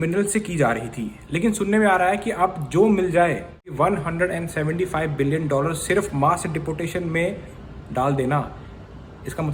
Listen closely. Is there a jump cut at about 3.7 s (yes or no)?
yes